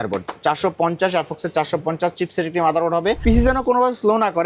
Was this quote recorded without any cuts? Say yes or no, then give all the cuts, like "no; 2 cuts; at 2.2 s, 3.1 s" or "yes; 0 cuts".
no; 1 cut; at 3.2 s